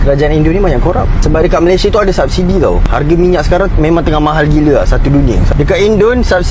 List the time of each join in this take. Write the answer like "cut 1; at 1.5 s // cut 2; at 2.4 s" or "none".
none